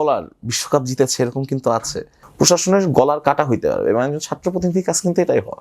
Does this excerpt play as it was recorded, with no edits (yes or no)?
no